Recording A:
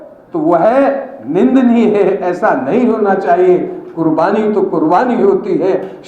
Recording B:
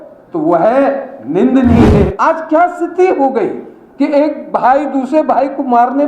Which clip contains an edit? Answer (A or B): B